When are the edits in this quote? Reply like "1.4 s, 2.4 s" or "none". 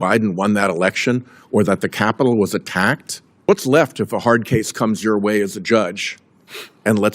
3.5 s